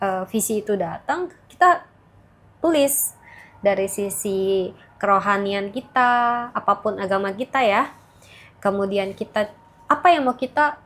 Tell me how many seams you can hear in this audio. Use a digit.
0